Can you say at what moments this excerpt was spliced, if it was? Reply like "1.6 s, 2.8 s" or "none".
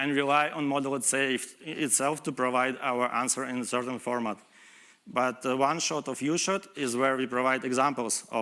none